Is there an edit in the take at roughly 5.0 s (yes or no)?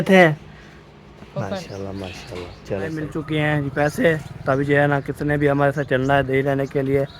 no